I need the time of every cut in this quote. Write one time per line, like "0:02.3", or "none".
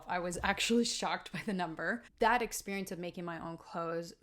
0:02.0